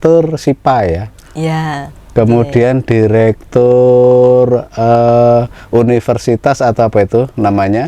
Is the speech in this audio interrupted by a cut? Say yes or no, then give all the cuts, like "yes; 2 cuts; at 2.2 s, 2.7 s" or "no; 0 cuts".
no; 0 cuts